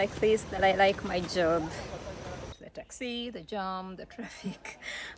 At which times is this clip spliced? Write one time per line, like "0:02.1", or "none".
0:02.6